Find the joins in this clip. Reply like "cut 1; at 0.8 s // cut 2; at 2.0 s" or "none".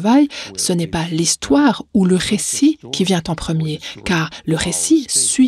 none